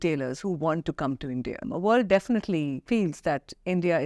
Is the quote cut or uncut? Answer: cut